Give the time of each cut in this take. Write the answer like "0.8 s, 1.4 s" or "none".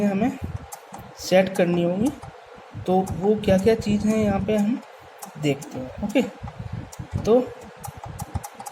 none